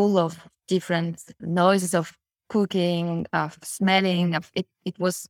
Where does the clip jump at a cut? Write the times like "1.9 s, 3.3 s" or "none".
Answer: none